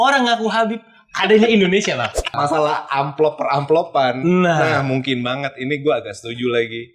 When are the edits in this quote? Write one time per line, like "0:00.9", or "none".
0:02.3